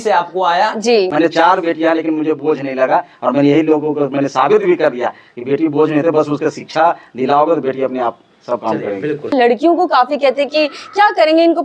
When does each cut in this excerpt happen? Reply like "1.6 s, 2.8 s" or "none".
1.1 s, 9.3 s